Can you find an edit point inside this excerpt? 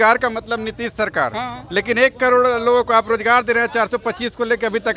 no; 0 cuts

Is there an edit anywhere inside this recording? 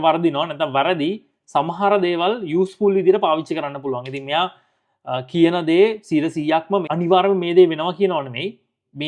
yes; 1 cut; at 6.9 s

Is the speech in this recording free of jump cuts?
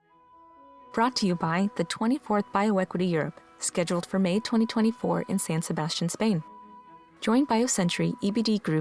no; 1 cut; at 0.9 s

